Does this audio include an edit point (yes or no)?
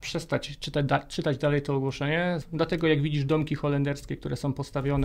yes